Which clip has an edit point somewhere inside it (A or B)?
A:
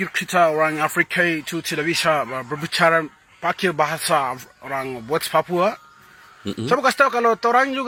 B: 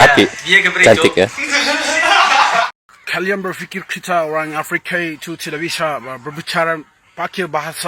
B